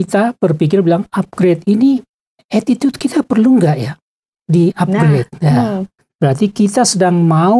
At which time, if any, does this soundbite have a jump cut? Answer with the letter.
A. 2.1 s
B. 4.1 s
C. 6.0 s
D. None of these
C